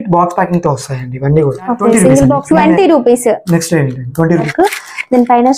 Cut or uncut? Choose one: cut